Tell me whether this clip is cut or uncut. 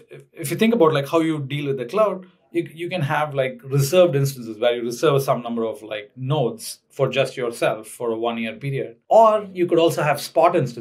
cut